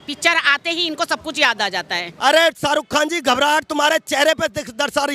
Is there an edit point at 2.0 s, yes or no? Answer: yes